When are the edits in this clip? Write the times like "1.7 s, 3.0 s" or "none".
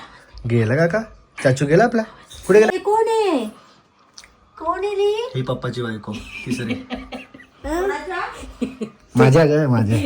2.7 s